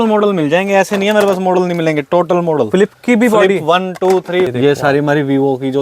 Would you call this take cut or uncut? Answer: cut